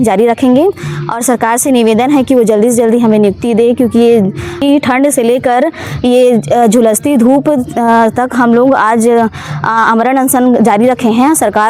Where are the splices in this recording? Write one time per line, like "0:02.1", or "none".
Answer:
none